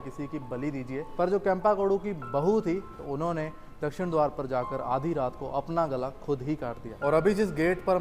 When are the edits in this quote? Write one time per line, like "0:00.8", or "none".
0:01.1
0:03.0
0:06.9